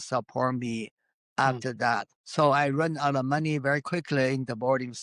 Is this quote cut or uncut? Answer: cut